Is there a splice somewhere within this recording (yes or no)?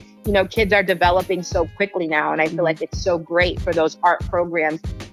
no